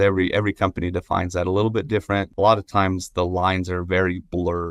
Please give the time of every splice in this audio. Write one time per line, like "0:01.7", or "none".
0:02.3